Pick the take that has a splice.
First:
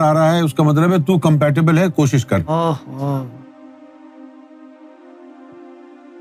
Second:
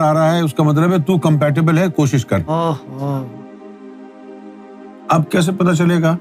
second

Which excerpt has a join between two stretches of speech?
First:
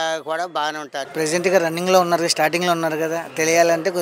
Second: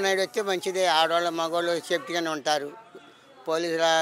first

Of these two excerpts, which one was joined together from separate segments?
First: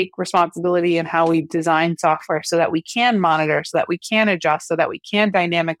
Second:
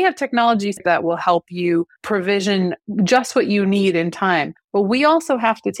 second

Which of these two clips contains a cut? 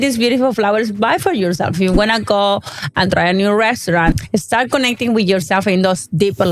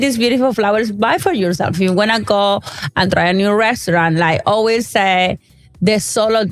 first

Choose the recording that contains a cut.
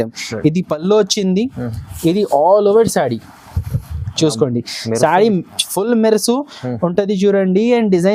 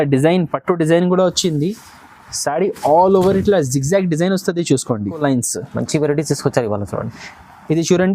second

